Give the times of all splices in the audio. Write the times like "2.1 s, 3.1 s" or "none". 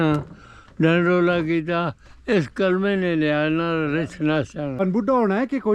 4.7 s